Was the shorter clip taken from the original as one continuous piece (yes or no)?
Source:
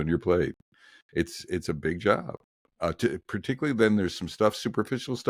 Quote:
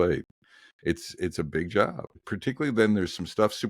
no